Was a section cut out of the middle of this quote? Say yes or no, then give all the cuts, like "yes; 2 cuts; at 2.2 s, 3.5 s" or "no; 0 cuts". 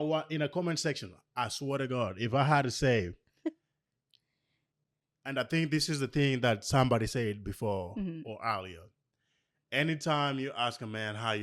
no; 0 cuts